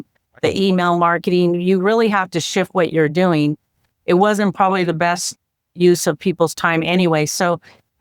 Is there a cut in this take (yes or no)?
no